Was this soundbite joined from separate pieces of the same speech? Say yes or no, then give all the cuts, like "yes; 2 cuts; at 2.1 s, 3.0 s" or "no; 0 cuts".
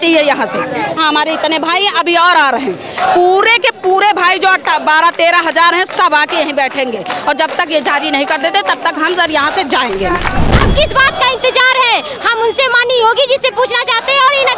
yes; 2 cuts; at 1.0 s, 10.5 s